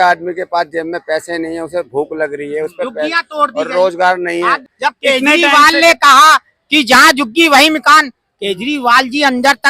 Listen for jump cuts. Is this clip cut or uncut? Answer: cut